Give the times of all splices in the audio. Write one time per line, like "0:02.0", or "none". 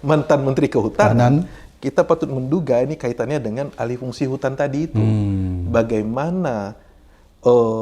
none